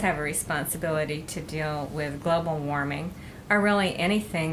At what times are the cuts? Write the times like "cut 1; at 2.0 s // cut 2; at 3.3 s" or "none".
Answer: none